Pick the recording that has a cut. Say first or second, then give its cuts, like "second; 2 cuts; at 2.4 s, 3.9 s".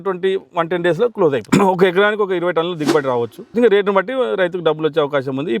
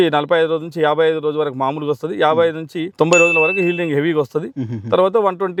first; 2 cuts; at 1.4 s, 3.5 s